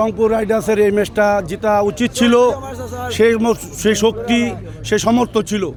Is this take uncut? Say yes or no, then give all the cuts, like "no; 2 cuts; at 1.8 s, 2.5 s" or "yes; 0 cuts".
yes; 0 cuts